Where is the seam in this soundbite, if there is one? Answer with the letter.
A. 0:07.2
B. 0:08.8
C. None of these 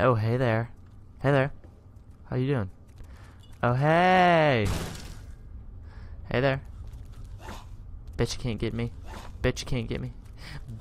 C